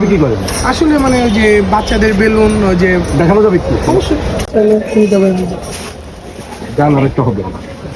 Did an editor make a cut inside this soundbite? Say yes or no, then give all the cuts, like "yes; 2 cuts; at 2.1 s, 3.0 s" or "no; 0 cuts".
no; 0 cuts